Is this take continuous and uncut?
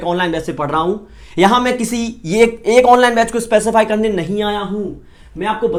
yes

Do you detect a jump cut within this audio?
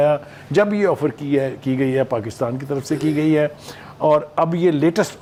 no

